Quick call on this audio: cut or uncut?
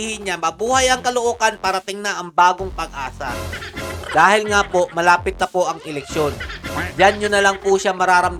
uncut